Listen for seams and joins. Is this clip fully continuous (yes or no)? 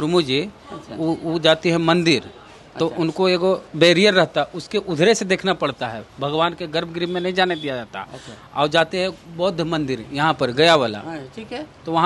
yes